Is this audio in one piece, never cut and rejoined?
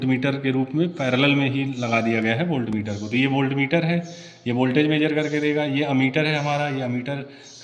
yes; 0 cuts

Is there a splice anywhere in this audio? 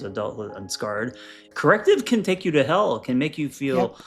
yes; 1 cut; at 1.5 s

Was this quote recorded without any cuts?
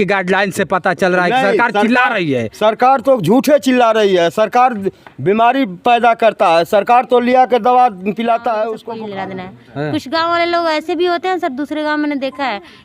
no; 1 cut; at 8.8 s

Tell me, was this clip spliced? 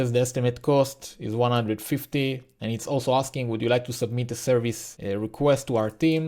yes; 2 cuts; at 2.5 s, 4.9 s

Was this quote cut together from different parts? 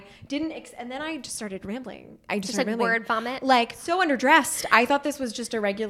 yes; 2 cuts; at 2.3 s, 3.8 s

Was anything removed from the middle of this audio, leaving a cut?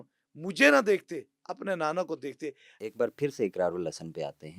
yes; 1 cut; at 2.7 s

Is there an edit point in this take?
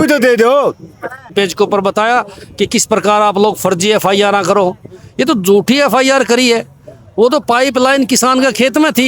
yes; 1 cut; at 1.3 s

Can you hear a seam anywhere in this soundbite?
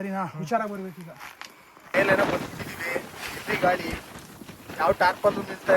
yes; 1 cut; at 1.9 s

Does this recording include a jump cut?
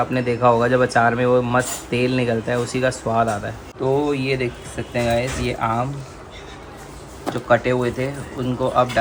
no; 0 cuts

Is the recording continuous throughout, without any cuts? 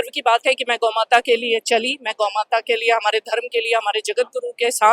yes; 0 cuts

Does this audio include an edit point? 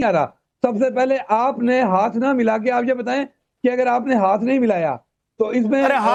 no; 0 cuts

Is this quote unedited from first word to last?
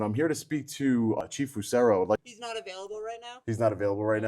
no; 2 cuts; at 1.2 s, 2.3 s

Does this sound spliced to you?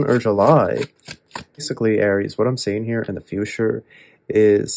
yes; 1 cut; at 1.7 s

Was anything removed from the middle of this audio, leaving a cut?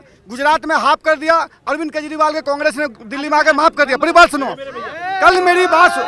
no; 0 cuts

